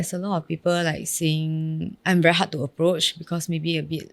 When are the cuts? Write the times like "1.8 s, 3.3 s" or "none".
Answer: 1.9 s